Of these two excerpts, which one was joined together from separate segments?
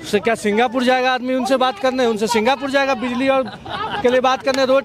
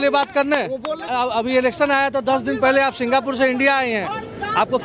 second; 1 cut; at 1.0 s

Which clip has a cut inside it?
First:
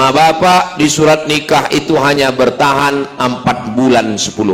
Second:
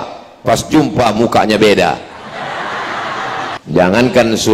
second; 1 cut; at 3.5 s

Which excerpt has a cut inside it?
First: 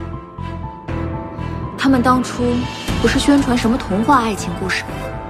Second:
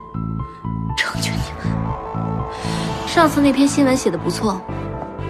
second; 1 cut; at 3.0 s

